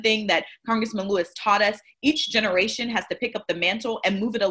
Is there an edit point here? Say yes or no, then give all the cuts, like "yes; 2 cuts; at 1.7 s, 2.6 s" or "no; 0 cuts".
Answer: no; 0 cuts